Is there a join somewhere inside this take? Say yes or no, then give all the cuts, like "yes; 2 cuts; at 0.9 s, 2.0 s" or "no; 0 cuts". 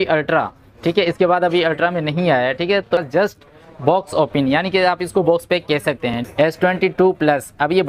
yes; 2 cuts; at 2.9 s, 6.3 s